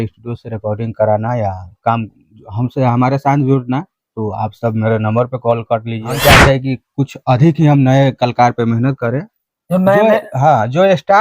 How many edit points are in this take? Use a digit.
1